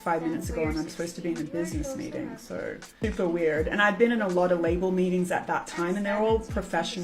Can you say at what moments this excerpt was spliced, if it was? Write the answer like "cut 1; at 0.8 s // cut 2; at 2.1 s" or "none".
cut 1; at 3.0 s